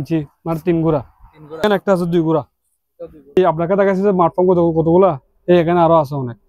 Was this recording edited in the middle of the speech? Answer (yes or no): yes